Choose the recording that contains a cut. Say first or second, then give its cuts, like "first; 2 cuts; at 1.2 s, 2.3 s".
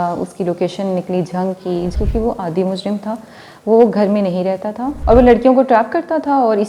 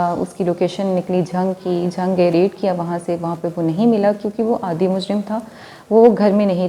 first; 2 cuts; at 1.9 s, 4.9 s